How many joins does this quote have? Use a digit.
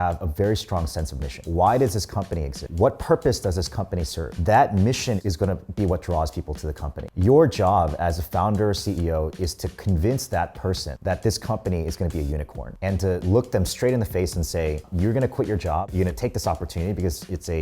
1